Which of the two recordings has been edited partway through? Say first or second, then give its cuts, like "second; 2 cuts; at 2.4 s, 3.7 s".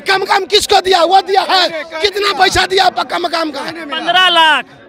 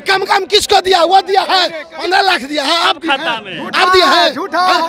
second; 1 cut; at 1.8 s